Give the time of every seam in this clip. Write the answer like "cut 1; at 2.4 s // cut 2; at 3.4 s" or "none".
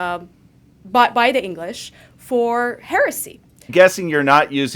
cut 1; at 3.7 s